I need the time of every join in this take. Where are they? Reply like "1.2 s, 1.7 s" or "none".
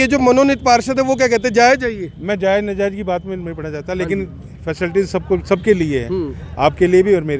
none